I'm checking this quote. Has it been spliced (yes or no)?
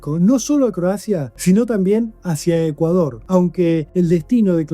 yes